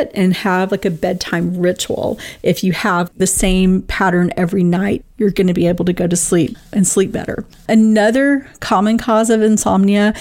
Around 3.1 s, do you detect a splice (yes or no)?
yes